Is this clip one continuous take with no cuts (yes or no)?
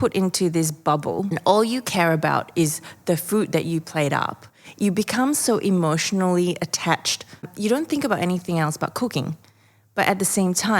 no